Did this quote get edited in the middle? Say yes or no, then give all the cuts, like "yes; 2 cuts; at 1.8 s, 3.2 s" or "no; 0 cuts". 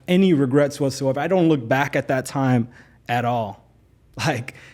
no; 0 cuts